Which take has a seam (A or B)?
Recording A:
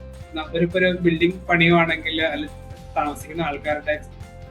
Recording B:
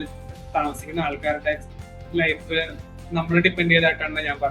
A